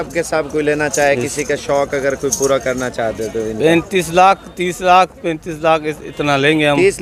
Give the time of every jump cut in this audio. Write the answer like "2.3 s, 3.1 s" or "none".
none